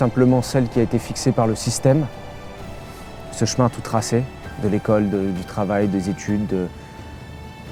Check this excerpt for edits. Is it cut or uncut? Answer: uncut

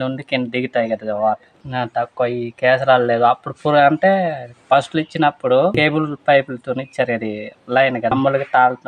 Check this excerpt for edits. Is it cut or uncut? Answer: cut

